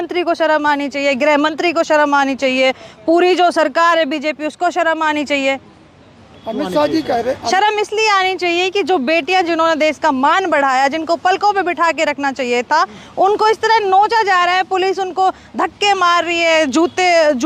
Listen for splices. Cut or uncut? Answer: uncut